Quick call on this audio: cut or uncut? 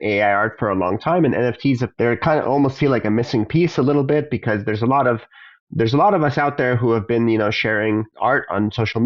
cut